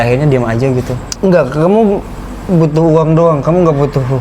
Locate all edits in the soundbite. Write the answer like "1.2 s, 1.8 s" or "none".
1.0 s

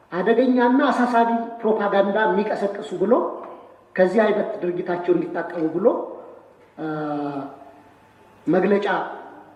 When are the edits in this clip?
none

